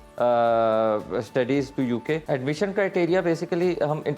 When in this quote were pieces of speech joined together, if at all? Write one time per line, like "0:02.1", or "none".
0:02.2